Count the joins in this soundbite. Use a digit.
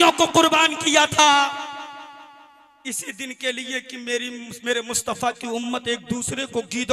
0